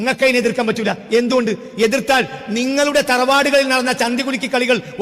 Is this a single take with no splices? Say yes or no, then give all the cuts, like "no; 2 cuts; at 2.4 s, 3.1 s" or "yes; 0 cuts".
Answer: yes; 0 cuts